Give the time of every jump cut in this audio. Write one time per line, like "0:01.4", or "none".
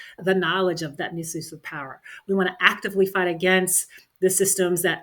0:01.0